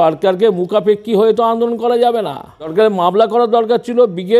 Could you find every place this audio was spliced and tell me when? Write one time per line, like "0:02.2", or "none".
0:02.7